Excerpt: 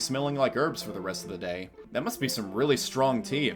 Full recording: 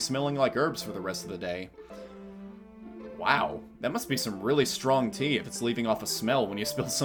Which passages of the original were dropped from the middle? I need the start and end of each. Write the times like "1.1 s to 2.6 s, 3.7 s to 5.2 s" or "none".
1.8 s to 3.7 s